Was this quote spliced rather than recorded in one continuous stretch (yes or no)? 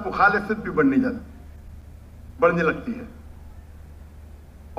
no